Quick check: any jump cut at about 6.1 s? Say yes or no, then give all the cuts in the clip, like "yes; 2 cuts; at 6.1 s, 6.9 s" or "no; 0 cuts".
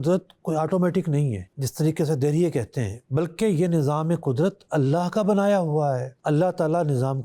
yes; 2 cuts; at 1.5 s, 6.1 s